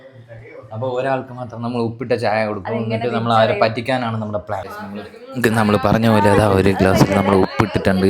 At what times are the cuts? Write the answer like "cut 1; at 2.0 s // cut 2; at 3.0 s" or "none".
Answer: cut 1; at 4.7 s